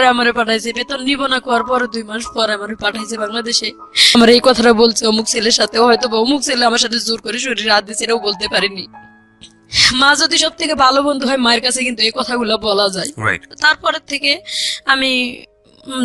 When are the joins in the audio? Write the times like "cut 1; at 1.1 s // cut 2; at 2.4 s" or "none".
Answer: cut 1; at 4.2 s